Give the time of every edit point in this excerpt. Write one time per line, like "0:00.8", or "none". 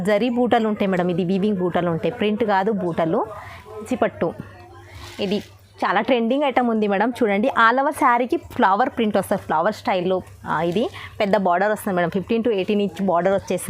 0:03.8